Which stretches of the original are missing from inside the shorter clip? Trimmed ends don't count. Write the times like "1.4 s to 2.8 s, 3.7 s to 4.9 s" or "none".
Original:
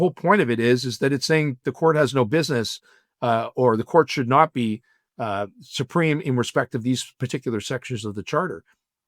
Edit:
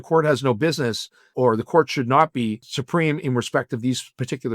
3.0 s to 3.5 s, 4.9 s to 5.7 s